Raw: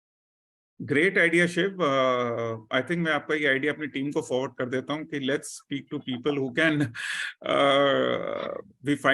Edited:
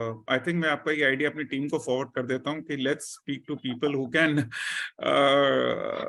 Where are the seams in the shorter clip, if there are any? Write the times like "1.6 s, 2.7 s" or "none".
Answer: none

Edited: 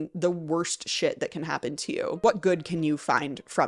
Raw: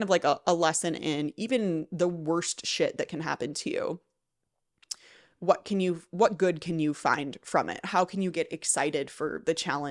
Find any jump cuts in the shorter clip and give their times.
2.2 s

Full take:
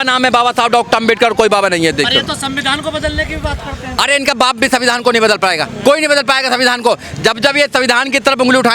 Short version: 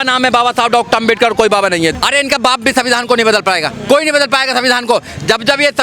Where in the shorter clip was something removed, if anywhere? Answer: 1.9 s

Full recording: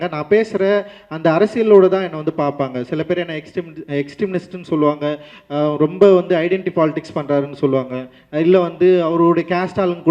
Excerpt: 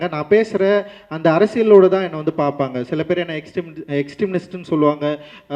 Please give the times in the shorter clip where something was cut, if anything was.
none

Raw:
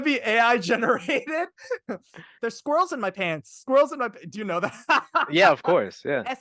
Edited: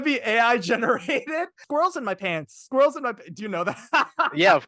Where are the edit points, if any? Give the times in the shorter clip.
1.6 s

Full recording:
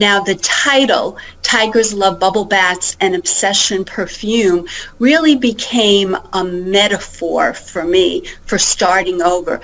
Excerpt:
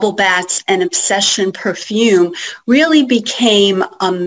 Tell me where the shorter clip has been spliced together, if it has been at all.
none

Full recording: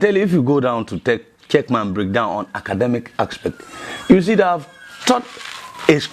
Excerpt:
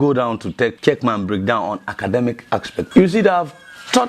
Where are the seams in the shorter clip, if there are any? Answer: 0.8 s, 2.9 s

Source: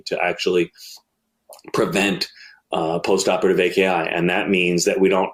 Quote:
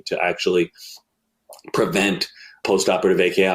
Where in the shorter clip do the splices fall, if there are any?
2.6 s

